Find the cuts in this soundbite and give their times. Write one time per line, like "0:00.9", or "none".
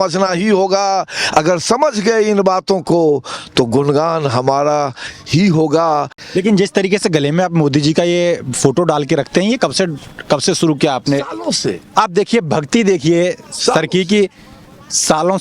0:06.2